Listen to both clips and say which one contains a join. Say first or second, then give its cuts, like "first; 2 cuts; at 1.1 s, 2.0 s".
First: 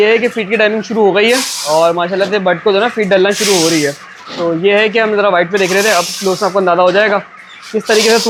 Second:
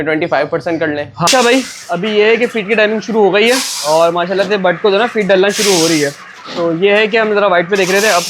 second; 1 cut; at 1.3 s